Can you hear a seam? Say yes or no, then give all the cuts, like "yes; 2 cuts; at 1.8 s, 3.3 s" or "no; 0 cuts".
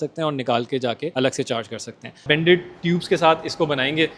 yes; 2 cuts; at 1.1 s, 2.2 s